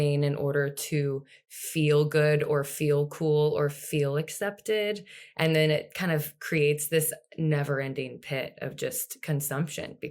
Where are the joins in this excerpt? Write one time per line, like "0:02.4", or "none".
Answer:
none